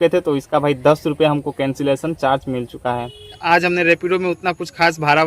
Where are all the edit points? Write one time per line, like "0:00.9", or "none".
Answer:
0:03.4